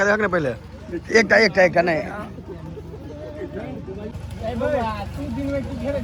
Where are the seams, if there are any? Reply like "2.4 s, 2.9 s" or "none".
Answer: none